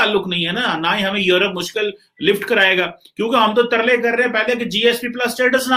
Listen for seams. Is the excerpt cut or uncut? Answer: uncut